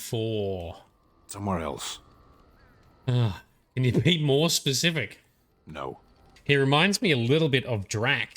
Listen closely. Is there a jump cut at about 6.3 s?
yes; 1 cut; at 6.3 s

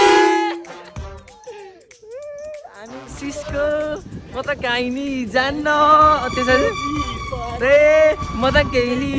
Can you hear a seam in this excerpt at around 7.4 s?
no; 1 cut; at 3.2 s

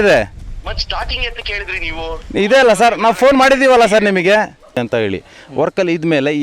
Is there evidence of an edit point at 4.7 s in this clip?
yes; 1 cut; at 4.7 s

